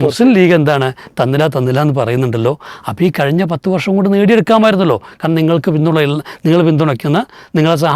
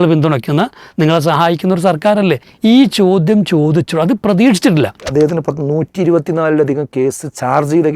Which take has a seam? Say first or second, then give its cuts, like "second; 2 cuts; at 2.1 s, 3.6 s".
second; 2 cuts; at 2.5 s, 5.1 s